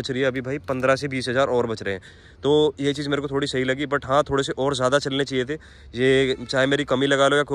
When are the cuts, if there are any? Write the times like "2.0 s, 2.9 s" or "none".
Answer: none